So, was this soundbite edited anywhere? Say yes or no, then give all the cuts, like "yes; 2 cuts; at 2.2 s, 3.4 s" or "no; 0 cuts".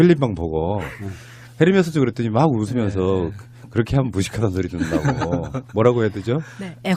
yes; 1 cut; at 2.5 s